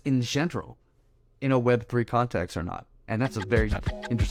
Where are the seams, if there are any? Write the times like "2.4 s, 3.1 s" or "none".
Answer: none

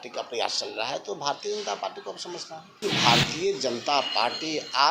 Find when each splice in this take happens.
2.8 s

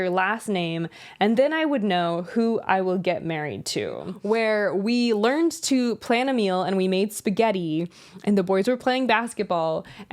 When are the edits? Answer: 4.1 s

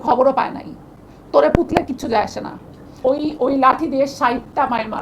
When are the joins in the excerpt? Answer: 2.9 s

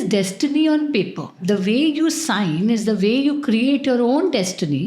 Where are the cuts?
1.3 s

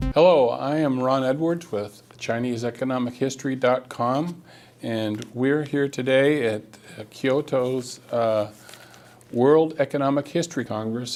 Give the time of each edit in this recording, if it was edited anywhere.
none

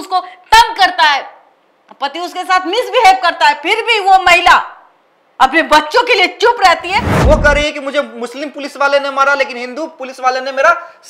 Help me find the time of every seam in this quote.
7.1 s

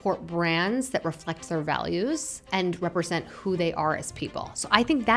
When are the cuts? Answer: 2.4 s

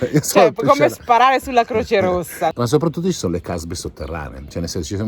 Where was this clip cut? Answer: 2.5 s

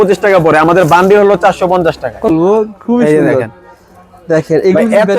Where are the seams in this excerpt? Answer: 2.3 s

